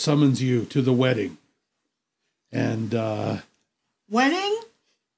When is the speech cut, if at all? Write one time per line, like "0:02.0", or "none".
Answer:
none

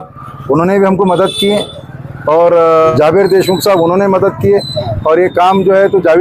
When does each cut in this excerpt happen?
0:02.9

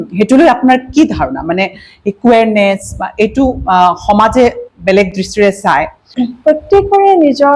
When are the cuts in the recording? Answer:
0:06.0

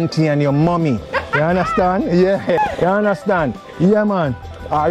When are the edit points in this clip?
0:02.6

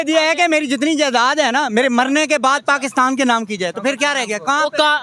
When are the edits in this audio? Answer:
none

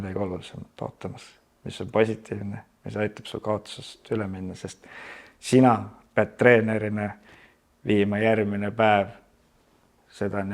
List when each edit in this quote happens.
none

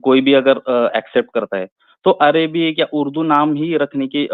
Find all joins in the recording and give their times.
none

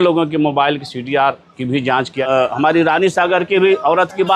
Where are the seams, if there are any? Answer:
0:02.2

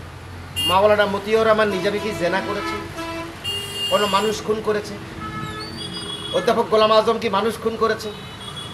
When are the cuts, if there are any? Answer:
none

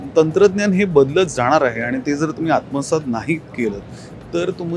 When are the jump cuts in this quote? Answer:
none

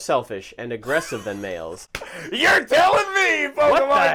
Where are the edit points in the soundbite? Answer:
none

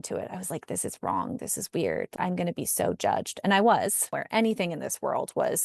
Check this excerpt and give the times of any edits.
0:04.1

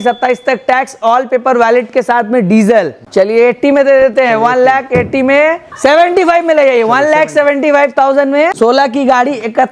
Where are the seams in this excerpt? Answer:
0:03.0
0:05.7

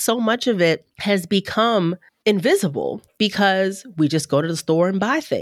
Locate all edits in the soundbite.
0:00.9
0:02.1
0:03.0

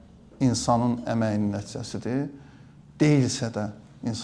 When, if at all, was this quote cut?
none

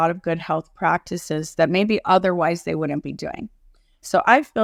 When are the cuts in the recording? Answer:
none

